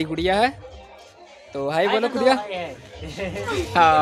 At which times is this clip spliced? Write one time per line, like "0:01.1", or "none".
none